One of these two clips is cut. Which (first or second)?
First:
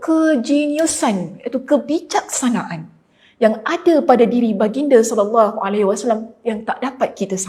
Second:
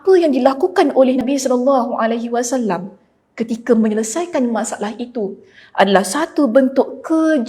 second